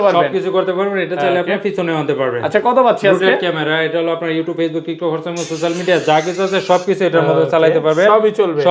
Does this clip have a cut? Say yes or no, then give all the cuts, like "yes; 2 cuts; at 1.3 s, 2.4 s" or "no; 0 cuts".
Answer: no; 0 cuts